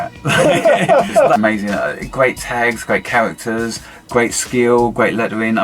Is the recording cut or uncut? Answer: cut